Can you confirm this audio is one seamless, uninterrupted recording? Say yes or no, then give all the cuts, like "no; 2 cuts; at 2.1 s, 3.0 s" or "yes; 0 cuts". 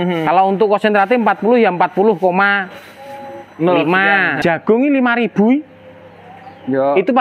no; 1 cut; at 4.3 s